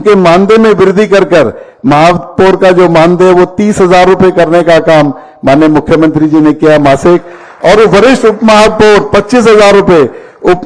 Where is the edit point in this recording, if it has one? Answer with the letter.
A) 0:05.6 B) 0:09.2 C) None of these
C